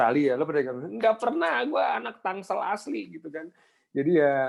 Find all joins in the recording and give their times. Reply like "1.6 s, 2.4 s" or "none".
none